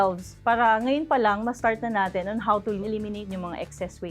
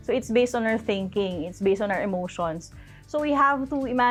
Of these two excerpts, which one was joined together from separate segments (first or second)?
first